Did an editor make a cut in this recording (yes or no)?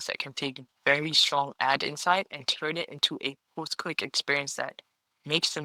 no